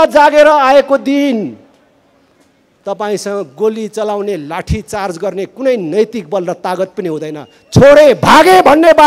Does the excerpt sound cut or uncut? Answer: uncut